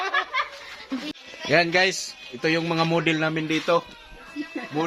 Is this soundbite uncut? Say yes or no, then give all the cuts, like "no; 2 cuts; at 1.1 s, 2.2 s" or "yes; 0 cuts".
no; 1 cut; at 1.1 s